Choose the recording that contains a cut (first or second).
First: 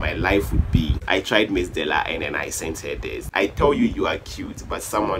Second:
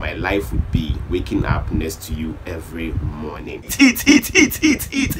first